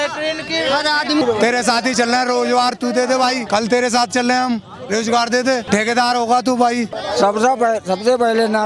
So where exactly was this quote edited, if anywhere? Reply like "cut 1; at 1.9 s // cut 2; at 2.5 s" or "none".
cut 1; at 1.2 s // cut 2; at 3.4 s // cut 3; at 5.6 s // cut 4; at 7.0 s